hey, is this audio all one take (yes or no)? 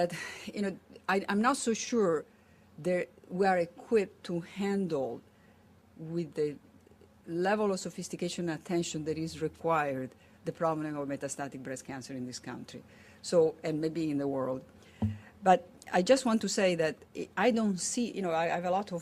no